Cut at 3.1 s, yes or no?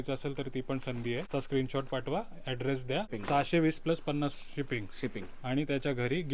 yes